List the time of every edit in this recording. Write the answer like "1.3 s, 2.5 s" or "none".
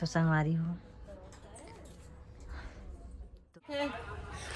3.6 s